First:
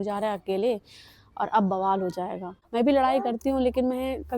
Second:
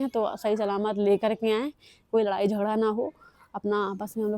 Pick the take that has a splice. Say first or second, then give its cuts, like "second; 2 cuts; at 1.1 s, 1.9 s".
first; 1 cut; at 2.6 s